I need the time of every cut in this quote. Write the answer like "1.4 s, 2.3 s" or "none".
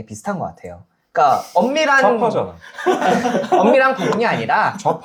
none